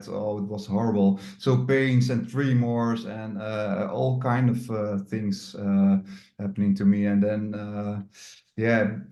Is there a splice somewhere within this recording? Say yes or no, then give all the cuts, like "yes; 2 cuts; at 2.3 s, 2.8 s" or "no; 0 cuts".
no; 0 cuts